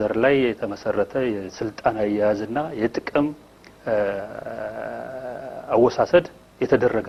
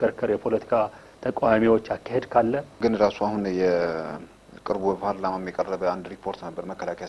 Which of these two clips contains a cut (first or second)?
second